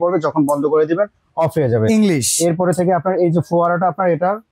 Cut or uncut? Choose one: uncut